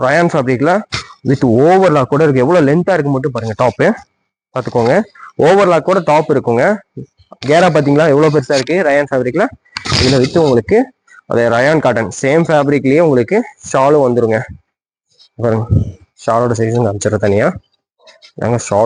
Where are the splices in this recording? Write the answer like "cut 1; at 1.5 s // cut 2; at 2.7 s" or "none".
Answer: none

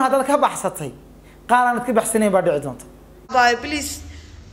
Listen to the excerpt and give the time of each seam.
cut 1; at 3.3 s

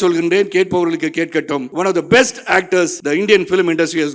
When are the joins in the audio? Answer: cut 1; at 1.7 s // cut 2; at 3.0 s

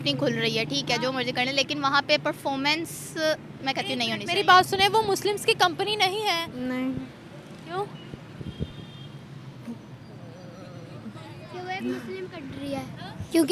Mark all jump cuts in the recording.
cut 1; at 6.5 s

